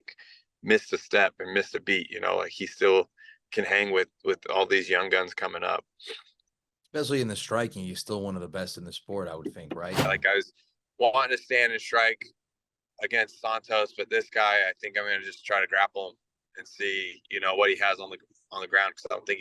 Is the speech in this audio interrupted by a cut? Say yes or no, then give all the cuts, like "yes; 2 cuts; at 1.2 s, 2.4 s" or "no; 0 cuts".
yes; 1 cut; at 10.1 s